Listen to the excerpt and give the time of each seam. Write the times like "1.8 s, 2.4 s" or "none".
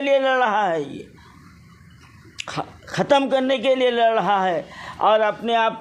none